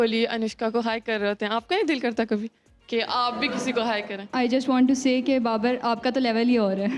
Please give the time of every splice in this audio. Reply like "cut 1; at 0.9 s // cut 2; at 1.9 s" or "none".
cut 1; at 4.3 s